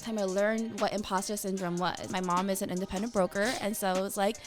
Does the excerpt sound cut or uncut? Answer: cut